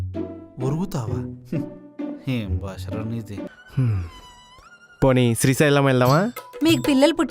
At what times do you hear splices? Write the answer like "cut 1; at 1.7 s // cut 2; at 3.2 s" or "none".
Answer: cut 1; at 3.5 s